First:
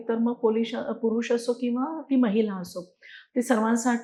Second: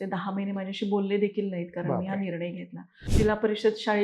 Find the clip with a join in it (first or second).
second